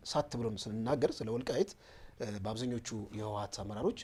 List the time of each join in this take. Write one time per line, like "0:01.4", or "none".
none